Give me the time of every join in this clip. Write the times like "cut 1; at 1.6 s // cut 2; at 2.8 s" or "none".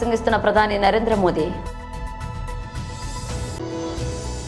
cut 1; at 1.6 s // cut 2; at 3.3 s